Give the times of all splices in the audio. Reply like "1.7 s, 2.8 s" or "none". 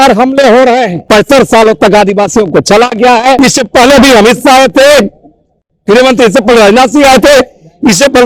1.0 s, 3.4 s